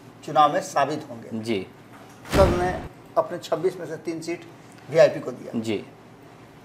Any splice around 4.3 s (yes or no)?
no